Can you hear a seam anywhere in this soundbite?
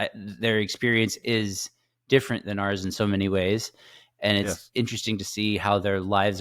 no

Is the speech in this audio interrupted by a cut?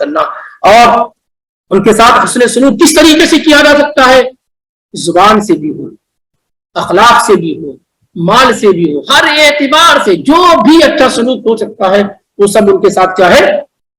no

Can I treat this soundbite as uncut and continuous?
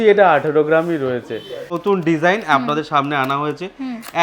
no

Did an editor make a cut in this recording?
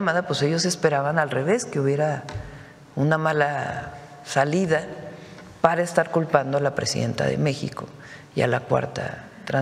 no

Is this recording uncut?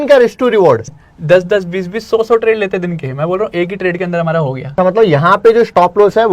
no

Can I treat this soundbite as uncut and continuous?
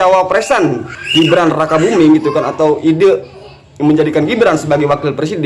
yes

